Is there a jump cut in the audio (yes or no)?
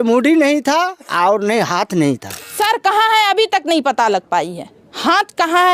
yes